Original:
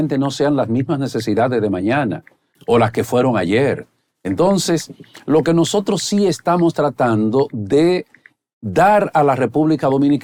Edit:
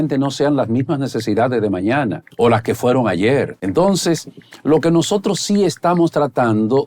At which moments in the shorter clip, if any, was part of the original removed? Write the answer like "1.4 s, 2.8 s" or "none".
2.2 s, 3.6 s